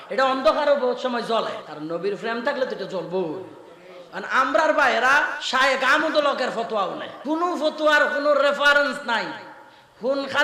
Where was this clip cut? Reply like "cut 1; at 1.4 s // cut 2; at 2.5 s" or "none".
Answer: cut 1; at 1.7 s // cut 2; at 5.4 s // cut 3; at 7.1 s